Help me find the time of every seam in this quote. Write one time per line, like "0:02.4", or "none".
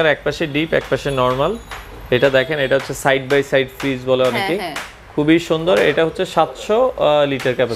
none

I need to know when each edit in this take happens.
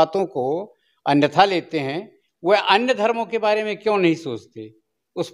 none

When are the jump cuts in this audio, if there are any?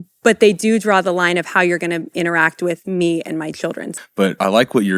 0:03.9

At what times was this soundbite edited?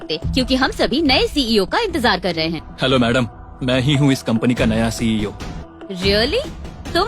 0:02.7
0:05.6

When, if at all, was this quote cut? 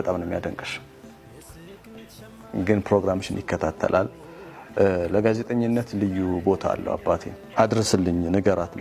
0:07.4

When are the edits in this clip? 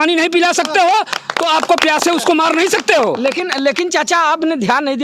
none

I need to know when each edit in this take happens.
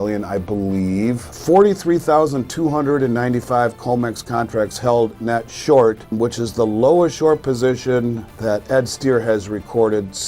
0:01.3
0:06.1
0:08.3

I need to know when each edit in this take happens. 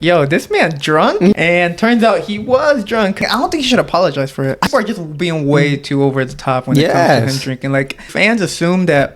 0:01.3
0:03.2
0:04.7
0:08.1

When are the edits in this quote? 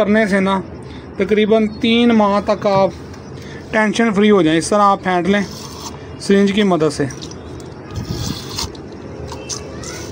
none

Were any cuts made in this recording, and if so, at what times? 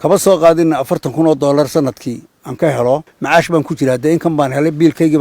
0:03.1

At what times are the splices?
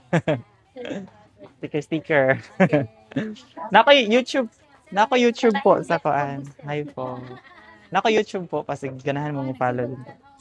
none

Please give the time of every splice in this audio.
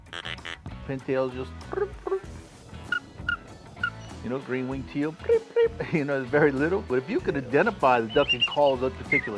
0:06.8

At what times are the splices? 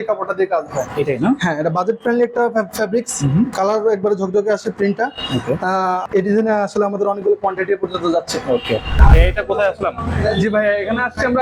0:06.0
0:09.0

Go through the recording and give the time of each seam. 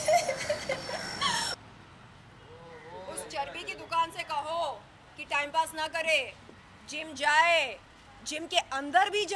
0:01.5

